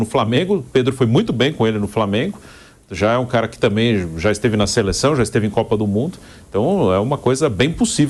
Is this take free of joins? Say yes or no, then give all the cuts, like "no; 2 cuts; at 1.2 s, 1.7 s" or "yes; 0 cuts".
yes; 0 cuts